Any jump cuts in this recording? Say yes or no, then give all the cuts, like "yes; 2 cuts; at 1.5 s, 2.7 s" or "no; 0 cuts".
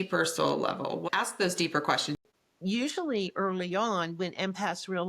yes; 1 cut; at 2.2 s